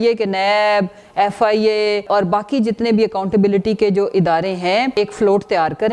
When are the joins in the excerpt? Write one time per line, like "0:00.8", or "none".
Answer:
0:02.1
0:04.9